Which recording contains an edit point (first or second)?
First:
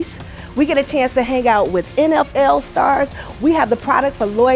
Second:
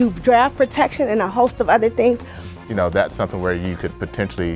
second